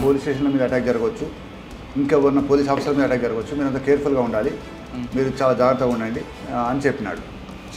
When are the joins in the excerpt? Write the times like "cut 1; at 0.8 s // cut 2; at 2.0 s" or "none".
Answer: cut 1; at 6.3 s